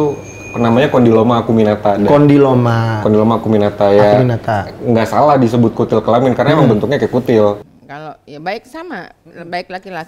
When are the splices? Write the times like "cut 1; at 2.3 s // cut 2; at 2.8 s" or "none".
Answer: cut 1; at 7.6 s